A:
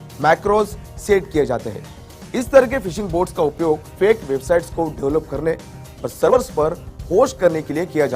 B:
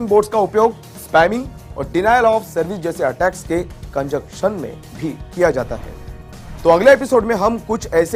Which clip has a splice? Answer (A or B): A